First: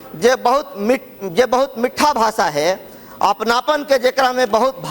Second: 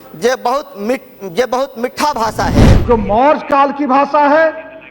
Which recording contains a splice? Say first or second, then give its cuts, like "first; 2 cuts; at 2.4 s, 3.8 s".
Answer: second; 1 cut; at 2.7 s